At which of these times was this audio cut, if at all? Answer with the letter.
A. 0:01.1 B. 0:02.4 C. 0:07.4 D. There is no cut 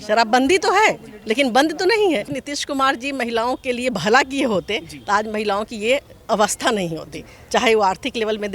B